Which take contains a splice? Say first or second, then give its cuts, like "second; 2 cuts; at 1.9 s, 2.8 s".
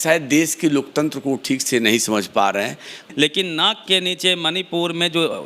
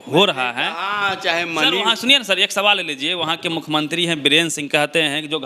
first; 1 cut; at 3.0 s